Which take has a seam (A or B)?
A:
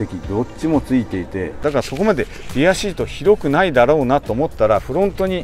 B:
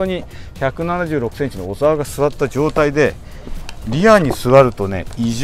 A